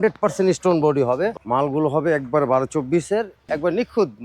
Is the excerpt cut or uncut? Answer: cut